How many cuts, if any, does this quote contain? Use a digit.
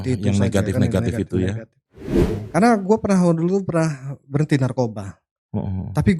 1